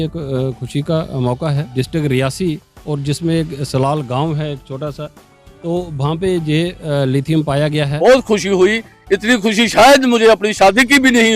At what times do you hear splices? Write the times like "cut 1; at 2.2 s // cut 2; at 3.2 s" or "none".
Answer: cut 1; at 1.7 s // cut 2; at 8.0 s

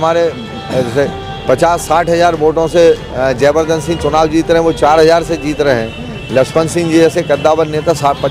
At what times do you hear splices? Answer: none

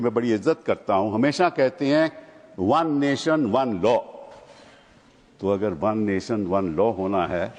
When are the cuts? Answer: none

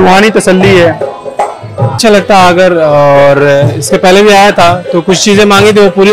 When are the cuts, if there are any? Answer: cut 1; at 1.9 s

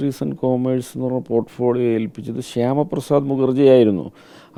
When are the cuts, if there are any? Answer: none

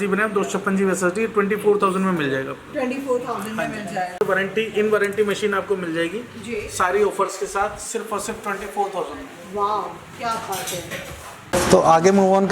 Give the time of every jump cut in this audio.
cut 1; at 4.2 s // cut 2; at 11.5 s

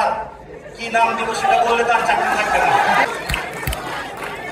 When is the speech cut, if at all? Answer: none

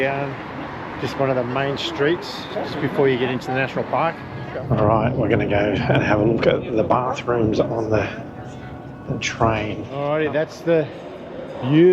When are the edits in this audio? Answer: cut 1; at 4.4 s // cut 2; at 9.9 s

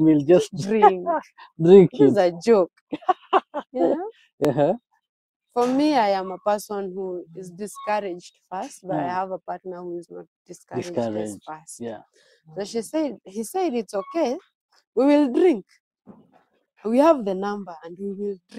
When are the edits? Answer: none

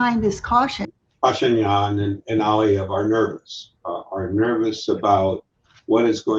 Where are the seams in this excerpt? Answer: cut 1; at 0.9 s

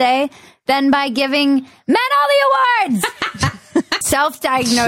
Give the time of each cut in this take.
cut 1; at 4.0 s

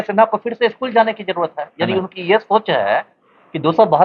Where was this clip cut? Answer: none

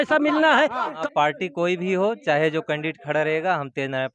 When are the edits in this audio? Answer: cut 1; at 0.9 s

